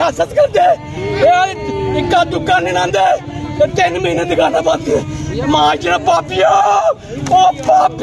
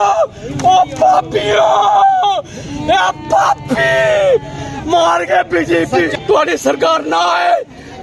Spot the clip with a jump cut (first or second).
second